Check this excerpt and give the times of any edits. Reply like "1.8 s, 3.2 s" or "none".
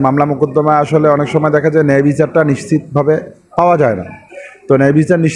none